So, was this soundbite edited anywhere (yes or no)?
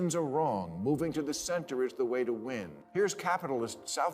yes